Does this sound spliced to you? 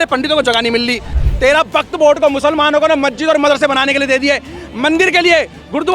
yes; 1 cut; at 1.2 s

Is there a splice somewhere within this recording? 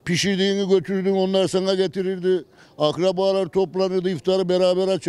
no; 0 cuts

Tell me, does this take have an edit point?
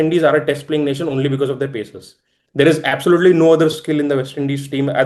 no; 0 cuts

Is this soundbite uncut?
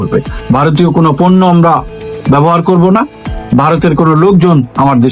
yes; 0 cuts

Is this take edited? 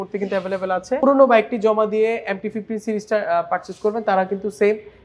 yes; 1 cut; at 1.0 s

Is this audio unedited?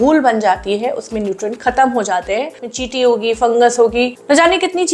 no; 1 cut; at 2.7 s

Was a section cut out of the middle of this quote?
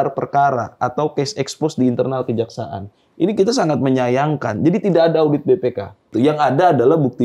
yes; 1 cut; at 6.1 s

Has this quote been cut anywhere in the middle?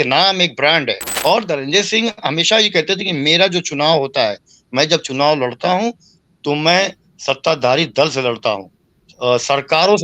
yes; 1 cut; at 1.1 s

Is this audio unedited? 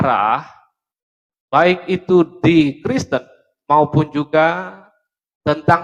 yes; 0 cuts

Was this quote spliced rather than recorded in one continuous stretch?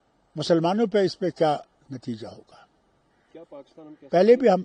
no; 0 cuts

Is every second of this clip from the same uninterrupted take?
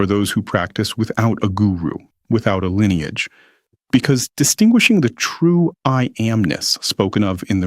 yes; 0 cuts

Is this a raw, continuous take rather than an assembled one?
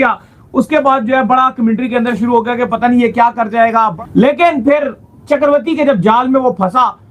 no; 1 cut; at 3.9 s

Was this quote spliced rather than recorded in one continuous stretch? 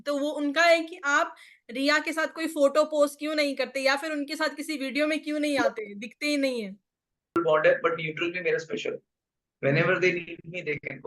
yes; 1 cut; at 7.4 s

